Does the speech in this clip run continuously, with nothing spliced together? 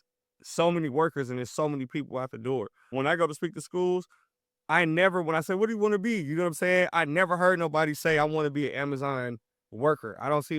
no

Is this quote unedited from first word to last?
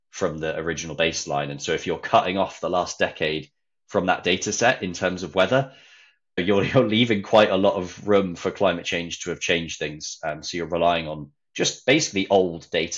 yes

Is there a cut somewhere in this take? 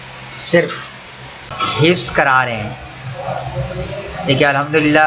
no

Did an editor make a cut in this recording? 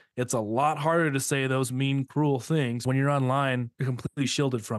yes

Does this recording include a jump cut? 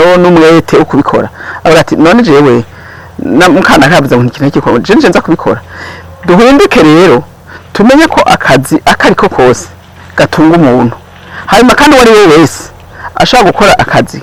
no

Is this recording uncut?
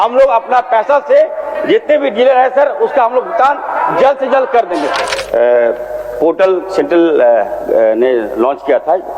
no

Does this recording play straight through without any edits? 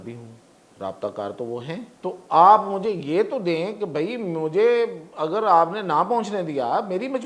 no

